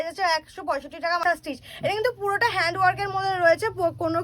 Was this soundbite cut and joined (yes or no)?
yes